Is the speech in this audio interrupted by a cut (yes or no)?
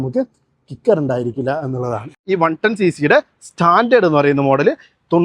yes